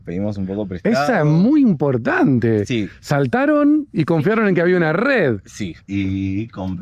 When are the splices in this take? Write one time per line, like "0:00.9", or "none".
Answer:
0:05.8